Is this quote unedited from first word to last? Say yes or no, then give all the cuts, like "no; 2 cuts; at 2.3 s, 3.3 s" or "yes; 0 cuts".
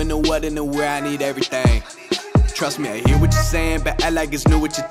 yes; 0 cuts